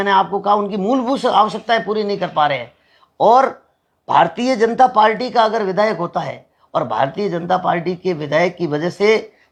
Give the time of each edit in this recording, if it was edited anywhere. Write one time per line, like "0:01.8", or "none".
none